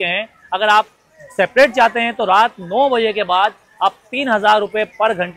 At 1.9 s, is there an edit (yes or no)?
no